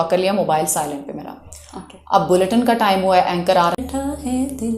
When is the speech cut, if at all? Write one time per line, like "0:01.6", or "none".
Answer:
0:03.8